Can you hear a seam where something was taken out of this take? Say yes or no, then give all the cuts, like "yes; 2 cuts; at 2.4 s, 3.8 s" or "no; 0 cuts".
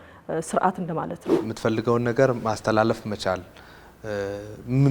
yes; 1 cut; at 1.3 s